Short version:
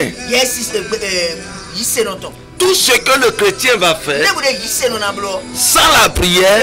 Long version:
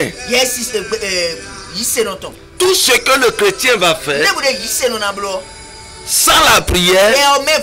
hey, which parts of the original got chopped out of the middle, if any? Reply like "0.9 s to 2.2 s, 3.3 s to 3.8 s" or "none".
5.6 s to 6.1 s